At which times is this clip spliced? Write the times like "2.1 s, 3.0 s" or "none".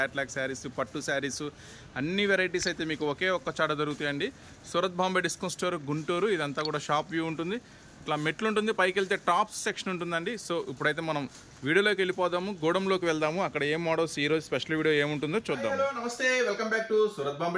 15.7 s